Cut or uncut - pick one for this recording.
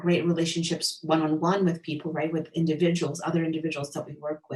uncut